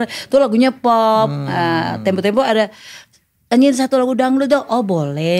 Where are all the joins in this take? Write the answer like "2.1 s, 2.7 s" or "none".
none